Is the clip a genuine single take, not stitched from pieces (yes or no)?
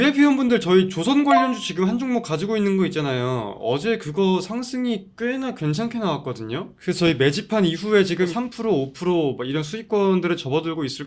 yes